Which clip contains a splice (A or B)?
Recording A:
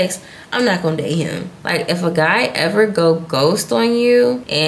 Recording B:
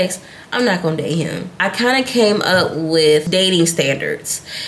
A